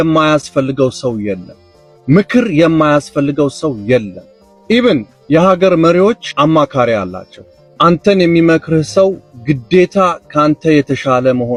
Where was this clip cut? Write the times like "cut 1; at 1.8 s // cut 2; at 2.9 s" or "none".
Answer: none